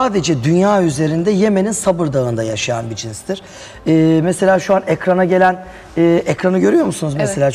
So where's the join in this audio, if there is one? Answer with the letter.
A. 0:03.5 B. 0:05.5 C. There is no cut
C